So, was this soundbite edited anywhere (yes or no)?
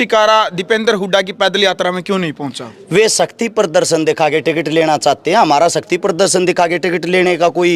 no